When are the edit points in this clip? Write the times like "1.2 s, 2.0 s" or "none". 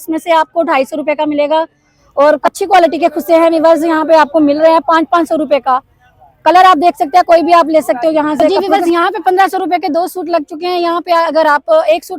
2.4 s, 8.5 s